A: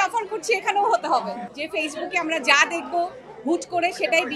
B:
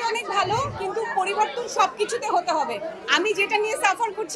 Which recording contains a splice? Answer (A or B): A